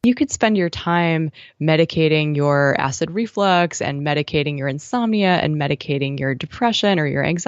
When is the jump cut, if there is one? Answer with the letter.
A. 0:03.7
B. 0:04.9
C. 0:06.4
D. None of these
D